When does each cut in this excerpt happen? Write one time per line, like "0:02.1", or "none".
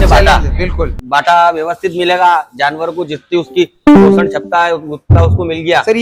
none